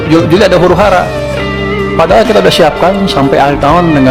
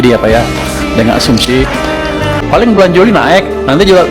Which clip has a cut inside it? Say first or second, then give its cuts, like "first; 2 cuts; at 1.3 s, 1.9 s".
second; 1 cut; at 2.4 s